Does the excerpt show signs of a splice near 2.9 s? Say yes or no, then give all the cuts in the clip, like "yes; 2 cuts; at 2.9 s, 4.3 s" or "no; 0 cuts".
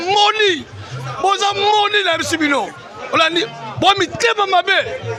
no; 0 cuts